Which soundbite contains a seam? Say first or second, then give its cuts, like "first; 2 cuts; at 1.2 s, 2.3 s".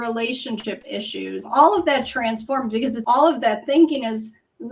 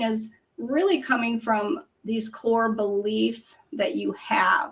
first; 2 cuts; at 1.5 s, 3.0 s